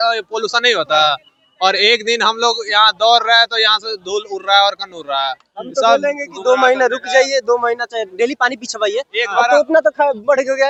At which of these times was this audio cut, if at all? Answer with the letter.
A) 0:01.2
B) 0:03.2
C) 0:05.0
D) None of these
D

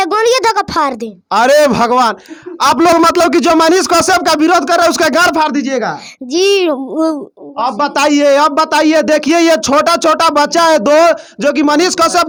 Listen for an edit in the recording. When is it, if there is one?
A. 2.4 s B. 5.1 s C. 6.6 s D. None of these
D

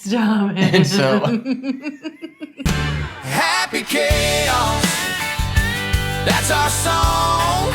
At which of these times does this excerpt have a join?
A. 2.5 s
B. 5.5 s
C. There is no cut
A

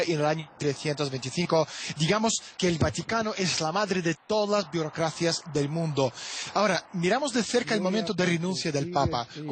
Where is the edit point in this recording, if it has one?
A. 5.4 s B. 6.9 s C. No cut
A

